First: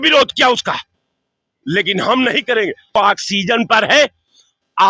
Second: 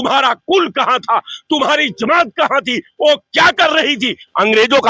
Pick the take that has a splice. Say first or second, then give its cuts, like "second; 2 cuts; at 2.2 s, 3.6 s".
first; 1 cut; at 3.0 s